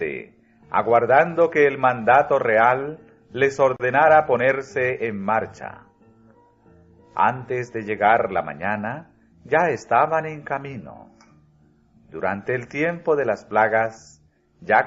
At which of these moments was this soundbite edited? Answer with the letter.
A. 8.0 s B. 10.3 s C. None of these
B